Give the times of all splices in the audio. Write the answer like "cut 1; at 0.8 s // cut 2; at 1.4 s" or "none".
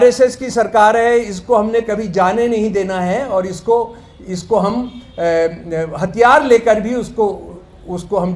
none